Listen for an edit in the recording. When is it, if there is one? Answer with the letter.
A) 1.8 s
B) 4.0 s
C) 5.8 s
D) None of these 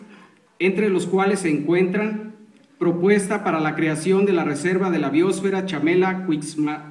A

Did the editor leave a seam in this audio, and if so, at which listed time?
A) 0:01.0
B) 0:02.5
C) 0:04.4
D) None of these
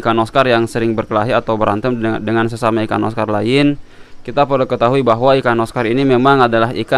D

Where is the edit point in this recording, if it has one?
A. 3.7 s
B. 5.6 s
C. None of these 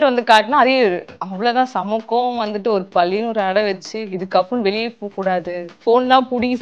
B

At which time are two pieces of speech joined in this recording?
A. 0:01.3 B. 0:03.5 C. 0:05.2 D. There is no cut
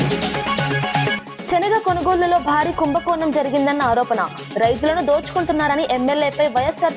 A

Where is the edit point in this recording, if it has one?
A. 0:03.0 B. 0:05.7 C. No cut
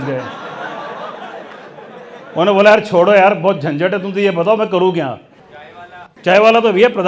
B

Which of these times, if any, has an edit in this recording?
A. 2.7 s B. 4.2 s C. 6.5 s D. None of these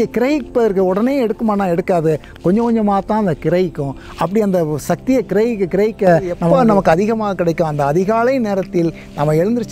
C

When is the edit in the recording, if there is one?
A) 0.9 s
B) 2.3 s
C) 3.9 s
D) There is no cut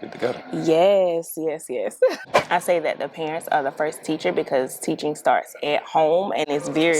B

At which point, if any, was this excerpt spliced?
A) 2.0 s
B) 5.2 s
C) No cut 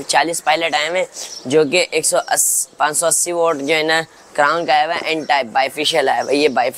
C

